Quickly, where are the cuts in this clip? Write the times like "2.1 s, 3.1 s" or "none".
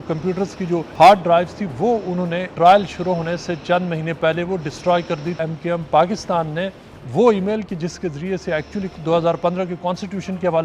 0.9 s, 2.5 s, 5.4 s